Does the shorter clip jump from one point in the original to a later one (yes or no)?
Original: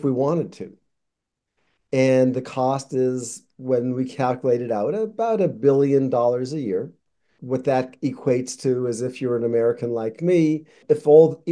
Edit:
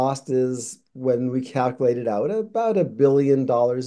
no